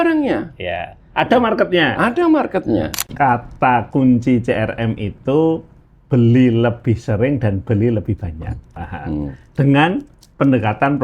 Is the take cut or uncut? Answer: cut